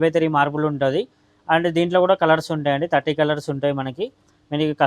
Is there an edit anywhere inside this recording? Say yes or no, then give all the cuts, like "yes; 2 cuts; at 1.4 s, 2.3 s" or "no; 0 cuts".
no; 0 cuts